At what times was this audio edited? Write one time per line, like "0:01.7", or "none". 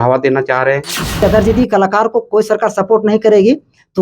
0:01.2